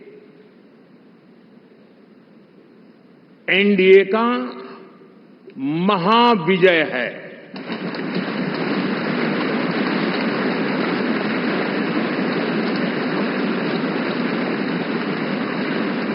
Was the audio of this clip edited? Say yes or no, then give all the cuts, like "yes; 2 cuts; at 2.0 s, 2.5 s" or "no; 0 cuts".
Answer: no; 0 cuts